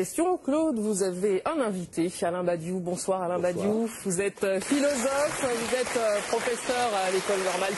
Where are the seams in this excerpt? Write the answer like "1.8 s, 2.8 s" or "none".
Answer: none